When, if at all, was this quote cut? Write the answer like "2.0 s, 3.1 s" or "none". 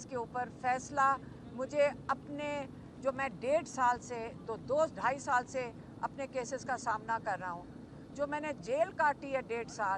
none